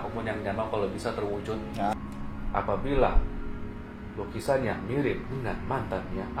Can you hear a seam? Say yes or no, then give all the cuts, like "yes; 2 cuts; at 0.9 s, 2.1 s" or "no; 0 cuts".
yes; 1 cut; at 2.0 s